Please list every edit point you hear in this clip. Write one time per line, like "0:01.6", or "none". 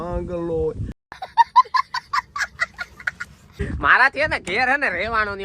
0:00.9
0:03.4